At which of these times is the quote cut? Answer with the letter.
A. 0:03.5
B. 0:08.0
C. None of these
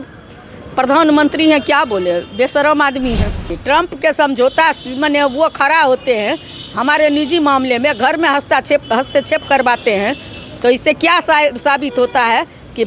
A